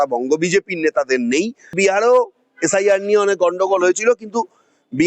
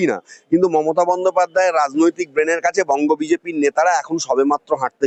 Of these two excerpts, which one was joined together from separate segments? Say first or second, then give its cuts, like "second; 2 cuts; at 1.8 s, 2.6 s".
first; 1 cut; at 1.8 s